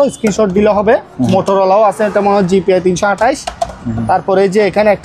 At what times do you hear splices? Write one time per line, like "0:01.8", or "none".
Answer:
none

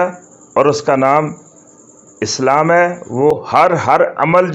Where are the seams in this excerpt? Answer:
0:03.3

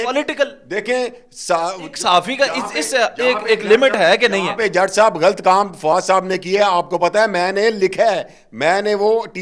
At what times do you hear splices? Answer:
none

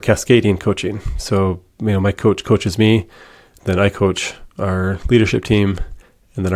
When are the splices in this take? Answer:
none

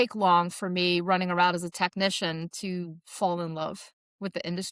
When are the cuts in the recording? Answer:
none

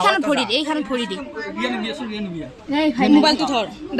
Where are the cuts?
none

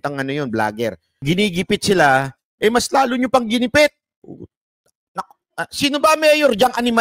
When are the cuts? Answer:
0:01.2

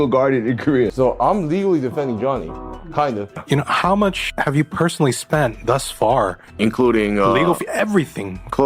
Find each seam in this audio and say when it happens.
0:00.9
0:03.3

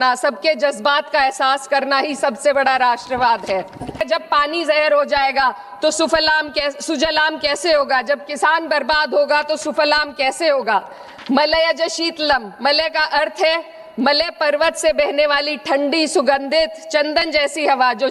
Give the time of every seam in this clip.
0:04.0

